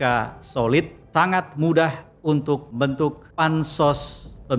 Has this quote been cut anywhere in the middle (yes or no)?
yes